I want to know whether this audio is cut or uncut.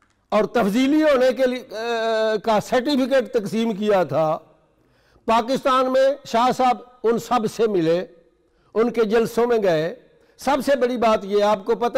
uncut